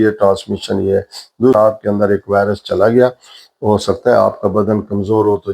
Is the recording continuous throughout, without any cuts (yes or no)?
no